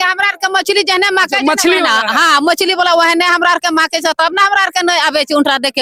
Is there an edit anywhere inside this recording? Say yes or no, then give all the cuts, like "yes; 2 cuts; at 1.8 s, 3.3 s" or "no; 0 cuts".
no; 0 cuts